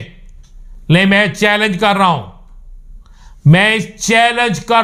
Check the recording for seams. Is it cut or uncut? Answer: uncut